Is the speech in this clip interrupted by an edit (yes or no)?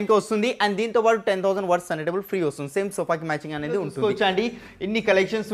yes